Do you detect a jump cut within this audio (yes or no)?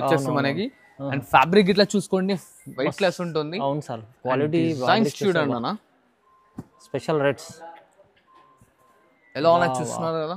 no